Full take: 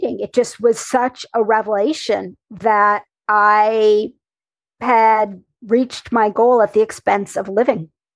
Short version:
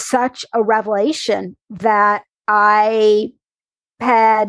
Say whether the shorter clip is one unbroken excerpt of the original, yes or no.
yes